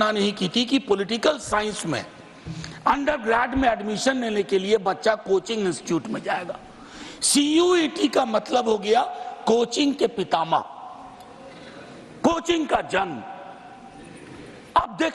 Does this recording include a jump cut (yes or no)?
no